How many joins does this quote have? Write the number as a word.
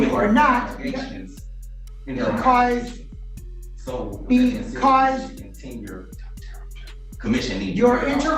zero